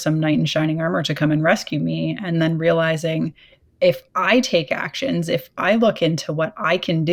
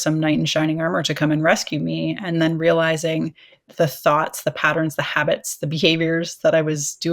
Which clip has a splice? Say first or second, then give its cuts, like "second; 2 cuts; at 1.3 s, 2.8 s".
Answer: second; 1 cut; at 3.6 s